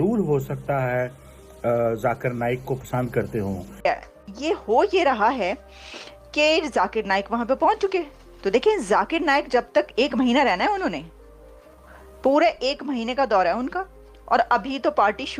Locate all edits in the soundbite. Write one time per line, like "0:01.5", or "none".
0:03.8